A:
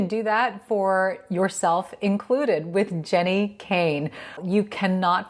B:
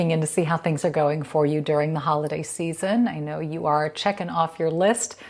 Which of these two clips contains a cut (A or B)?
A